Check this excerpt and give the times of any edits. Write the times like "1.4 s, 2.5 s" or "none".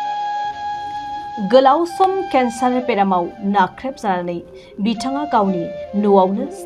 1.4 s